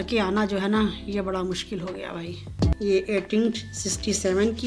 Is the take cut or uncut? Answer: cut